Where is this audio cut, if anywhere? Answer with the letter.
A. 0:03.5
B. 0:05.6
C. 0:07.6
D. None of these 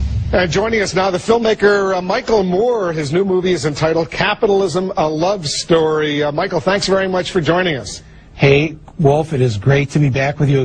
D